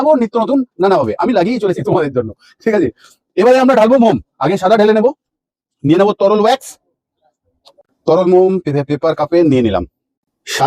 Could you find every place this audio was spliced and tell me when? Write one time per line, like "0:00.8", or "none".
none